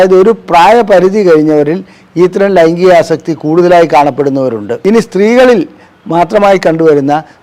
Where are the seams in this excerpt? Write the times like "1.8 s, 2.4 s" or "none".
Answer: 4.7 s